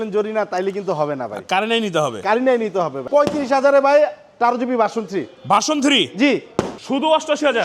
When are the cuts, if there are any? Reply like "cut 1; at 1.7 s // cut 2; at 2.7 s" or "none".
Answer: cut 1; at 3.1 s // cut 2; at 6.8 s